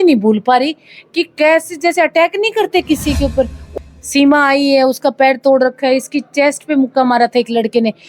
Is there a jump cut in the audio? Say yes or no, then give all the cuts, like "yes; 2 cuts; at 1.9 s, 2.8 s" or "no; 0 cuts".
yes; 1 cut; at 3.6 s